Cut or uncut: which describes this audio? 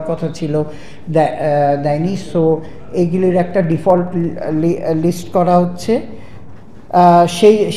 uncut